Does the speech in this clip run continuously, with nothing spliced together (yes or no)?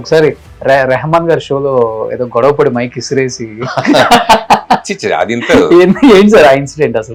yes